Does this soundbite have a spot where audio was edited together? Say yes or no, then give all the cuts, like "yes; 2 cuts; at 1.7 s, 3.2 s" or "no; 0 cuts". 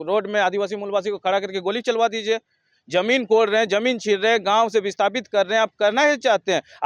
no; 0 cuts